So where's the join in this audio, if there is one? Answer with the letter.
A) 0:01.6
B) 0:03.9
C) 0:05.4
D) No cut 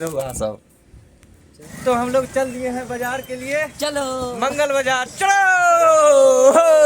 A